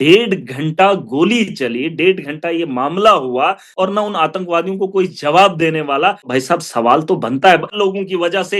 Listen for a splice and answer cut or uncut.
cut